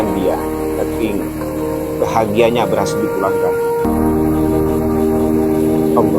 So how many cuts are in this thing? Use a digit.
1